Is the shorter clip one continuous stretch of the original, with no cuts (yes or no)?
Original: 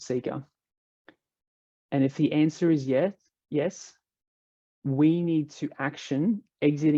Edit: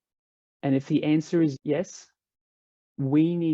no